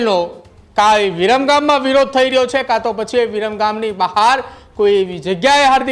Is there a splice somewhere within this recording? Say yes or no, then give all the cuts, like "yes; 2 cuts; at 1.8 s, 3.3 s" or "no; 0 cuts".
no; 0 cuts